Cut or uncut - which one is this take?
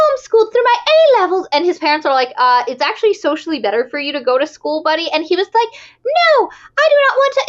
uncut